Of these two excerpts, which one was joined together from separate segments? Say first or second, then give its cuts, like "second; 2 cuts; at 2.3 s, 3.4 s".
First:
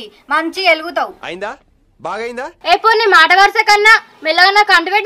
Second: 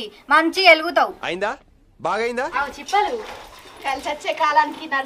second; 1 cut; at 2.5 s